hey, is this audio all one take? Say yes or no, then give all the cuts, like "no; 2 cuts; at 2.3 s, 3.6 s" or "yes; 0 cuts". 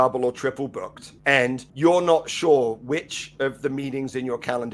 no; 1 cut; at 1.6 s